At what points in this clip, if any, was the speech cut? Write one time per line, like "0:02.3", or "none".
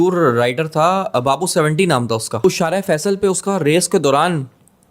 0:02.4